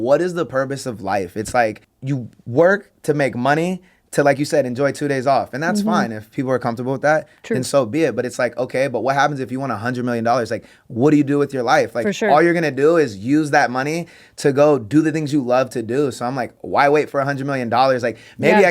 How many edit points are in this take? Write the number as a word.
one